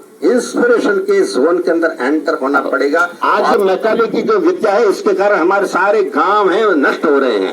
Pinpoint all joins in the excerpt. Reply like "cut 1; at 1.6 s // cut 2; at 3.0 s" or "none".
cut 1; at 3.1 s